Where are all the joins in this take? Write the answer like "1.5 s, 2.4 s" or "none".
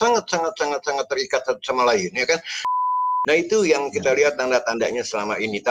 2.6 s

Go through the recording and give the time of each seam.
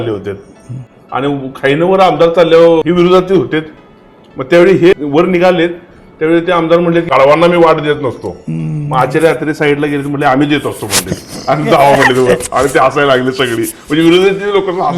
2.8 s, 4.9 s, 7.1 s

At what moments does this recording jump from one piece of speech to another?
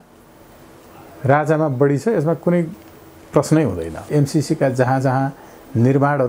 4.1 s

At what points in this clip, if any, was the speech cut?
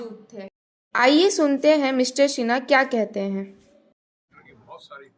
none

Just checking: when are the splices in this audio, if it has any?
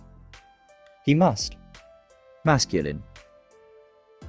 1.0 s

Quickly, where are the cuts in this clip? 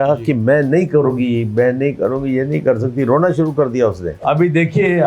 4.1 s

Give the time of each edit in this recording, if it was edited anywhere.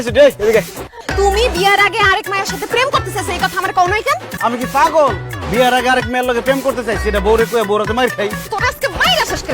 1.0 s, 4.2 s, 8.4 s

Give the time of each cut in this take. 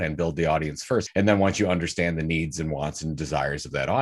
1.1 s

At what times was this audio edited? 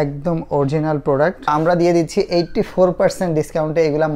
1.5 s

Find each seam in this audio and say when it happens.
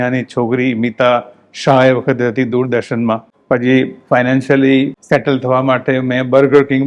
3.3 s

